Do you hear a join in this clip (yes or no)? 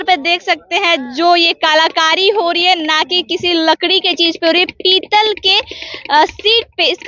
no